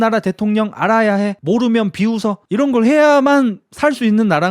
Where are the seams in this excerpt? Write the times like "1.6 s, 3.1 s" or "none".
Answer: 1.4 s, 2.4 s